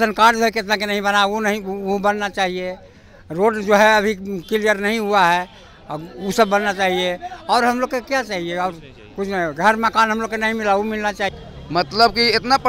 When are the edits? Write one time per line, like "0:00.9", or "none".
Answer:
0:11.3